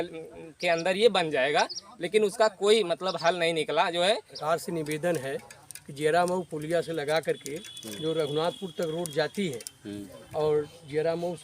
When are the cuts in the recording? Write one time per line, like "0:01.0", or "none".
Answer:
0:04.3